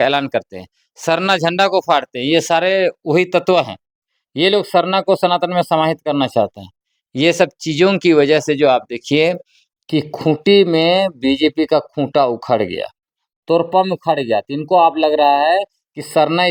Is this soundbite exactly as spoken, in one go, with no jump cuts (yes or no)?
yes